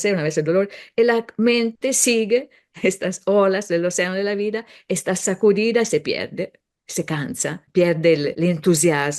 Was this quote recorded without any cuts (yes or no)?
no